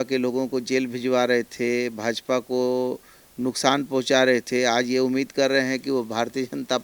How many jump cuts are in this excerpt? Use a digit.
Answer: 0